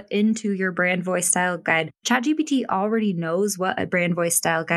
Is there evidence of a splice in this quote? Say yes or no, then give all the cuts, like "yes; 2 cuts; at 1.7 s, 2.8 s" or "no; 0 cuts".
no; 0 cuts